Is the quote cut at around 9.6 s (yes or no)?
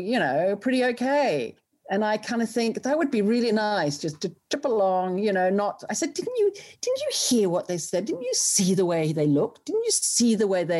no